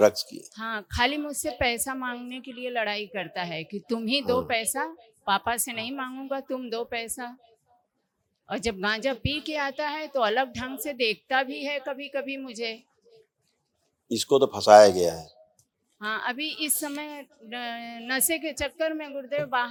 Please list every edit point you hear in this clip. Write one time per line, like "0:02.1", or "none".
none